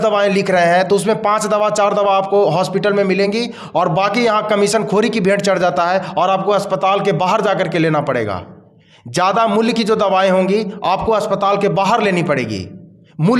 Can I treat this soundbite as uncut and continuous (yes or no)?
yes